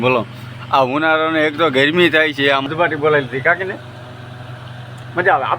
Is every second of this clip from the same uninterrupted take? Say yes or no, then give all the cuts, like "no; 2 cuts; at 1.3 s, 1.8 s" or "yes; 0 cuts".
no; 1 cut; at 2.7 s